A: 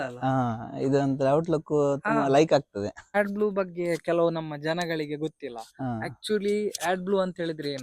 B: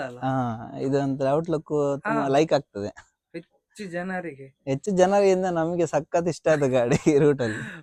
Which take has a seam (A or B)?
A